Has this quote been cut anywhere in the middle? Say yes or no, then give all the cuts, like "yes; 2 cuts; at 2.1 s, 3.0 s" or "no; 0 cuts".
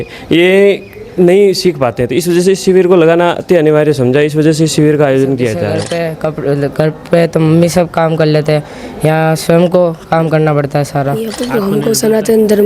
yes; 2 cuts; at 6.0 s, 11.4 s